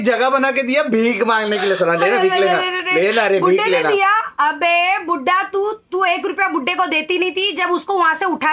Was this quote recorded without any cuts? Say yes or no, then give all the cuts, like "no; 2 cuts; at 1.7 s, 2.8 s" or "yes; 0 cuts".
yes; 0 cuts